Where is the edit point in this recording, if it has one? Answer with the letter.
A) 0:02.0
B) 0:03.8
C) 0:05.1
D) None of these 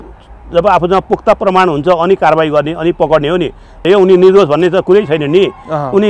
B